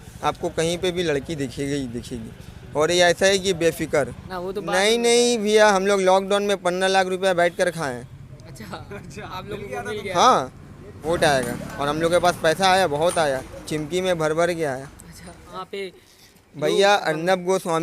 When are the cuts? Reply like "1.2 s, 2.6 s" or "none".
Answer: 4.3 s, 11.1 s, 15.5 s